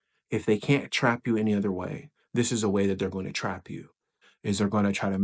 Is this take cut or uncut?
uncut